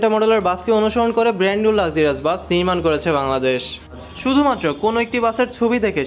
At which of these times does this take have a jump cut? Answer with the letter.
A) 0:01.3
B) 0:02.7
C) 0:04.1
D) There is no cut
C